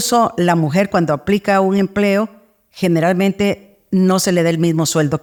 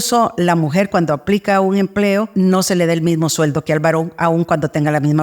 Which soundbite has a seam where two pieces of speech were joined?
second; 1 cut; at 2.3 s

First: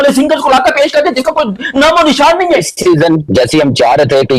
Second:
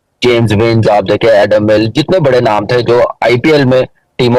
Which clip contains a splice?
first; 1 cut; at 2.7 s

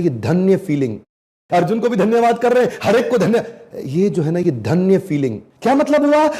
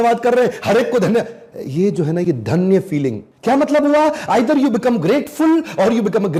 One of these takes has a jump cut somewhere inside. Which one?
first; 1 cut; at 1.2 s

